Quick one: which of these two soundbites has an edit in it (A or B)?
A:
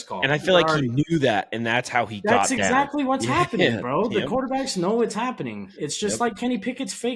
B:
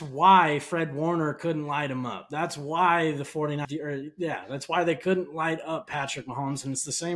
B